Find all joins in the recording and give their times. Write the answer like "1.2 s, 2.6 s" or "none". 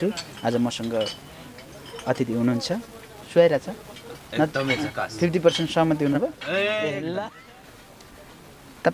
7.3 s